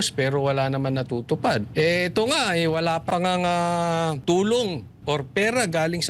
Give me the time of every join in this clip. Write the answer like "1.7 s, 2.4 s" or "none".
1.7 s, 3.1 s, 4.2 s